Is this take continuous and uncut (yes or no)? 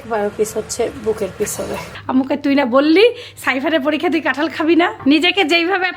no